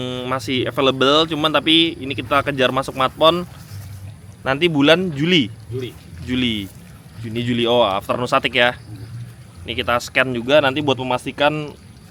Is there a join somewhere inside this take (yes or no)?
no